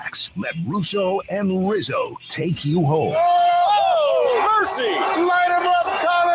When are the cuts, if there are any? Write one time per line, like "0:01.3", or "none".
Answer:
none